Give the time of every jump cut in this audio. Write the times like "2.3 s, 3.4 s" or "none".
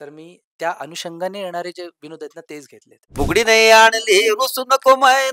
3.1 s